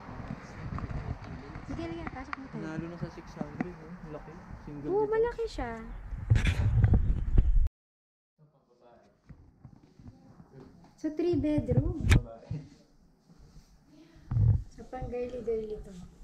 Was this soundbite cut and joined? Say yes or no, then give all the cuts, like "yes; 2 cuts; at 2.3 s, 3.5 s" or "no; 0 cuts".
yes; 1 cut; at 7.8 s